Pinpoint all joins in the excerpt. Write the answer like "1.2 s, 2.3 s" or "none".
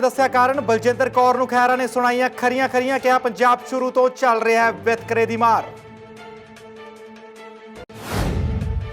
6.0 s, 7.8 s